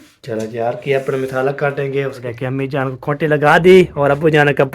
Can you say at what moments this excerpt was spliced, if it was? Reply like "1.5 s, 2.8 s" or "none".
2.2 s